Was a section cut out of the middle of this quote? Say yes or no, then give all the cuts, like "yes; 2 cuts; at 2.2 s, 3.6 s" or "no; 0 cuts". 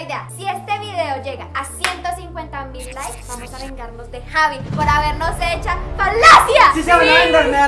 no; 0 cuts